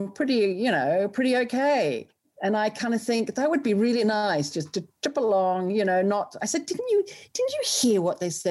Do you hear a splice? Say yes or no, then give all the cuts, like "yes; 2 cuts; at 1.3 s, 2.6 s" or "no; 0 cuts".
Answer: no; 0 cuts